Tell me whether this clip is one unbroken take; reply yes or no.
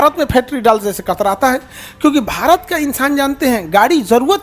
yes